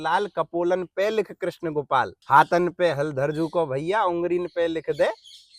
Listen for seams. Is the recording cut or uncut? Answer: cut